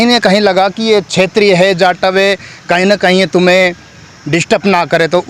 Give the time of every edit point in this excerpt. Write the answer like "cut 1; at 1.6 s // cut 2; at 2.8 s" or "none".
none